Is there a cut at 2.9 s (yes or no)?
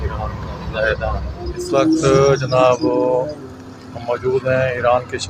no